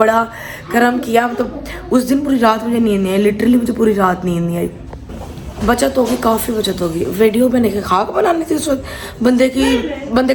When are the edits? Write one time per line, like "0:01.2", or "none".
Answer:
none